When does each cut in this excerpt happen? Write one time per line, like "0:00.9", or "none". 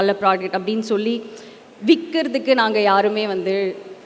none